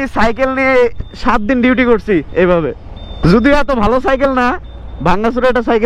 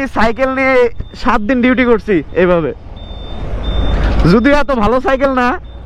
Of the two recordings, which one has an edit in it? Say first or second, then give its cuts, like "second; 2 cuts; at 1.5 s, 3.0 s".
first; 1 cut; at 3.1 s